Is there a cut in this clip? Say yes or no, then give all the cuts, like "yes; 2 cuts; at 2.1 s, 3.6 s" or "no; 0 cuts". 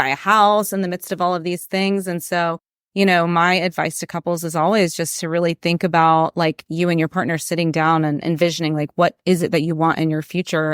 no; 0 cuts